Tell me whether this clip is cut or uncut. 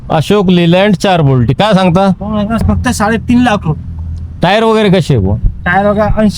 cut